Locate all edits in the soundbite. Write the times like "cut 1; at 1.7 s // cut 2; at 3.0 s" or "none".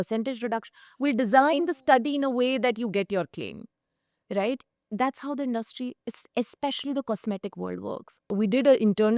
cut 1; at 8.1 s